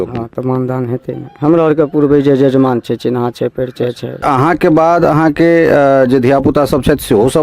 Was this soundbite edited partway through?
yes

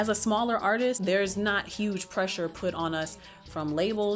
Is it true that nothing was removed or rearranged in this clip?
no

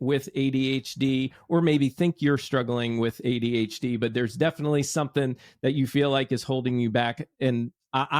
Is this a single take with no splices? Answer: yes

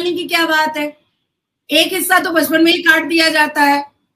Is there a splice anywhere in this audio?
no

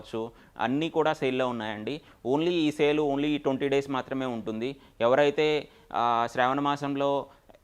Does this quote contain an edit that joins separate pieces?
no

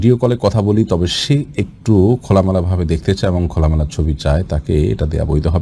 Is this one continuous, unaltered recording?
yes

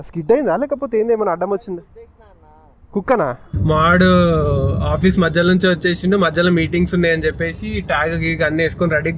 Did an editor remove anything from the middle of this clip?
yes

